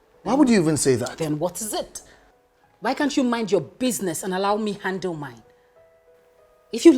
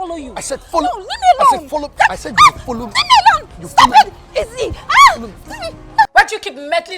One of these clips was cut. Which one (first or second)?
second